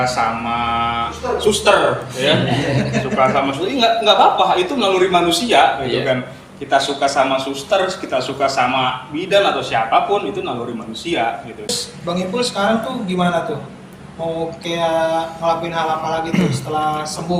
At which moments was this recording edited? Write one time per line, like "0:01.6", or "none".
0:11.7